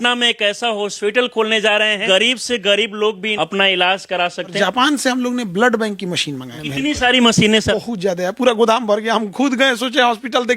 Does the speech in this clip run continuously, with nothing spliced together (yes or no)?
no